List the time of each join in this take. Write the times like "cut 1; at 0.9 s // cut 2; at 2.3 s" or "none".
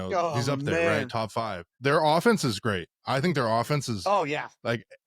cut 1; at 1.7 s